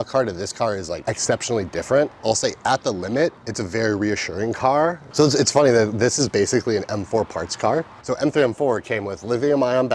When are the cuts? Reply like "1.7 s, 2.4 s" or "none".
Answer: 0.9 s, 3.5 s, 5.0 s, 7.9 s